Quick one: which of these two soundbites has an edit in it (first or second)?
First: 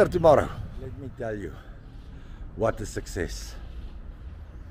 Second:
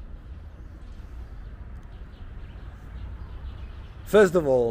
first